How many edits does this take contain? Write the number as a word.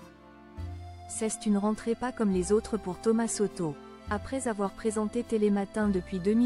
one